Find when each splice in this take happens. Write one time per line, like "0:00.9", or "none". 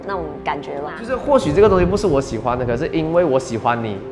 0:01.1